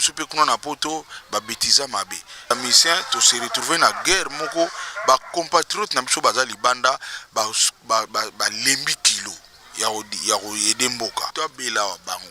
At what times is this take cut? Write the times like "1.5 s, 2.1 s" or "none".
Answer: 2.5 s, 11.3 s